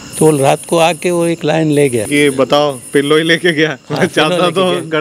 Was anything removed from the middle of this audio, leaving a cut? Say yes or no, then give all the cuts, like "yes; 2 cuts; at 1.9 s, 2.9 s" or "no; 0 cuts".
yes; 1 cut; at 2.1 s